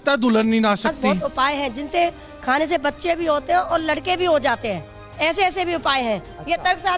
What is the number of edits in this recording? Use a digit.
1